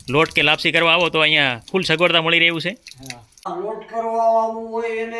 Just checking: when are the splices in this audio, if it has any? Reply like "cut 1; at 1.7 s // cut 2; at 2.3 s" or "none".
cut 1; at 3.5 s